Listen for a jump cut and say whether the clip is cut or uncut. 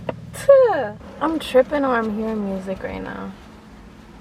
cut